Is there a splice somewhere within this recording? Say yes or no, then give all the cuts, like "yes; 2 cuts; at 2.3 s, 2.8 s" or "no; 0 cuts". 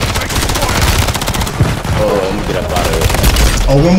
no; 0 cuts